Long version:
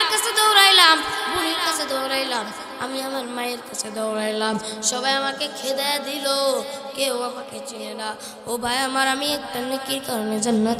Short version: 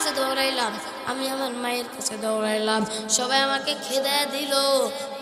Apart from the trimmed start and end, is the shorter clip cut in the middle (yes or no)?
no